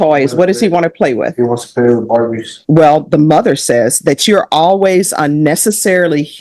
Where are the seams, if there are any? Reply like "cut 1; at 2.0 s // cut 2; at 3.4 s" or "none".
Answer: cut 1; at 2.5 s